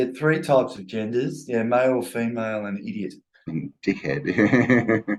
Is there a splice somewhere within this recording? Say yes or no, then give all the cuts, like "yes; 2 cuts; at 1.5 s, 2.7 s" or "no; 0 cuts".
no; 0 cuts